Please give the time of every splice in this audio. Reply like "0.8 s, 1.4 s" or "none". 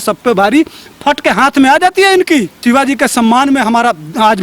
2.5 s